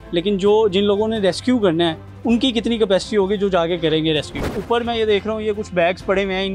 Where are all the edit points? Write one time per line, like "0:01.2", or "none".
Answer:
0:04.5